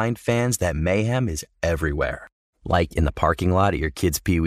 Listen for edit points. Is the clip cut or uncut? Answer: uncut